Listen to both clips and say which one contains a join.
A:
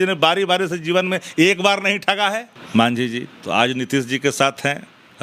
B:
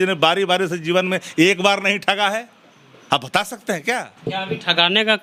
A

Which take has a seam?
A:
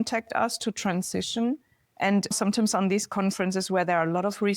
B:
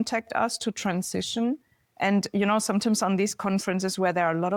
A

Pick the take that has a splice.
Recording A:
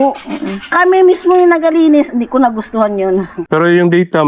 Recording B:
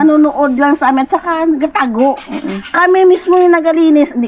A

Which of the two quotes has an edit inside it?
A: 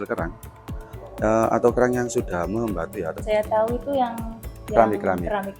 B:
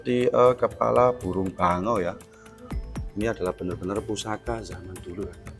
A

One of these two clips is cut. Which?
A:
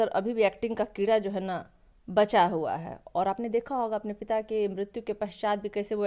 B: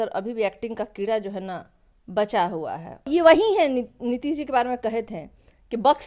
B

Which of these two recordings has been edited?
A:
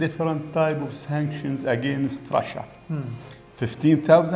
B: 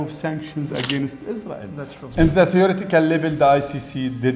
B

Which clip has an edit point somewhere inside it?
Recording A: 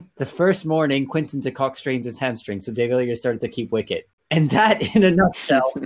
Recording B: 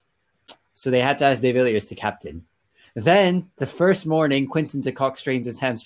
A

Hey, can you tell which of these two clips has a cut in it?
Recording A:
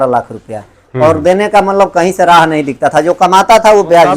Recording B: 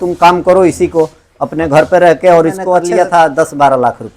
B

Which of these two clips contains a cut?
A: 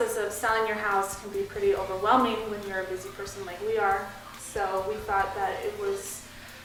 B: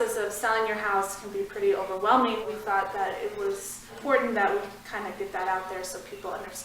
B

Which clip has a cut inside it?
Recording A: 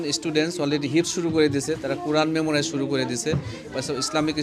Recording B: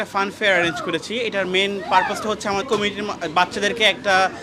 B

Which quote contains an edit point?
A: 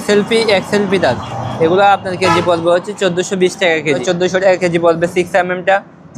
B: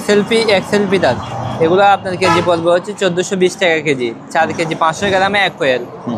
A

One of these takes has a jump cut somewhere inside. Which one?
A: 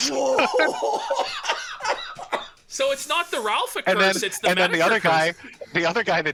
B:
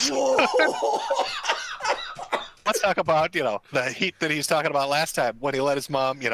B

